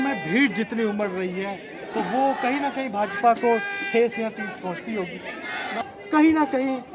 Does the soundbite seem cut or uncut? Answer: cut